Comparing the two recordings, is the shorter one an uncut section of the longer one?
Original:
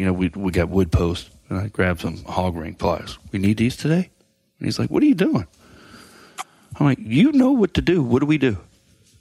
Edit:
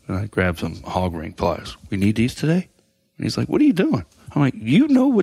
no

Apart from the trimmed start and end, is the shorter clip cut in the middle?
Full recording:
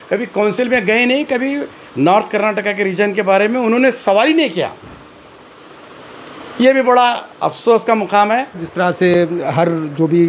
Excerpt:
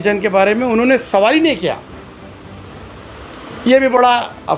no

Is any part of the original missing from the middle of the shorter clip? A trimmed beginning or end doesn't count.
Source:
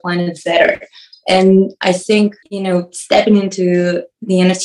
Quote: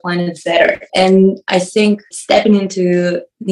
yes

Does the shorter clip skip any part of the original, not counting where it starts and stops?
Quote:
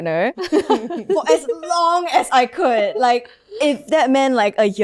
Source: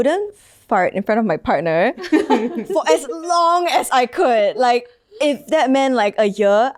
no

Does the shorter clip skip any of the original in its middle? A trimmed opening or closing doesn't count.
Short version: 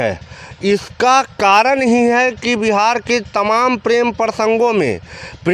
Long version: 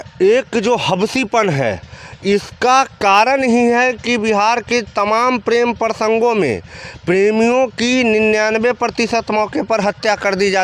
no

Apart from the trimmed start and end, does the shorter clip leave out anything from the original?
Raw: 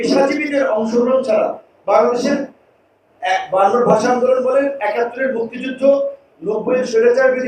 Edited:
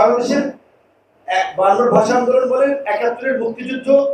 no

